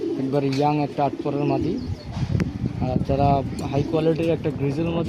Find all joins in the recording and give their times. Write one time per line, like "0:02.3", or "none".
none

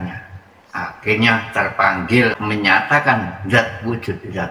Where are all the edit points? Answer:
0:02.3

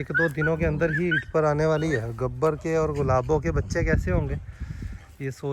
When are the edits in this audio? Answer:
none

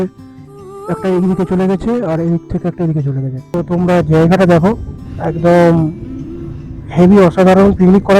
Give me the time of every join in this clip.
0:03.4

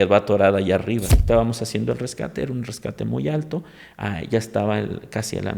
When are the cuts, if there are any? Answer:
0:01.1

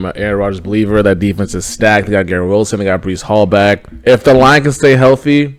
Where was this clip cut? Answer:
none

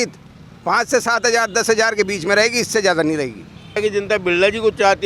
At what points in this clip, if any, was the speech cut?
0:03.8

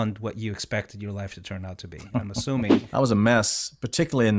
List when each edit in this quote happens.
0:02.8

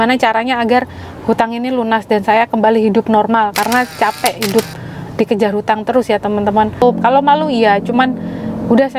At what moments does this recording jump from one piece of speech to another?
0:06.8

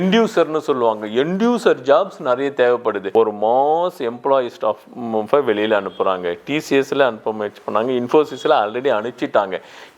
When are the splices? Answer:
0:03.0

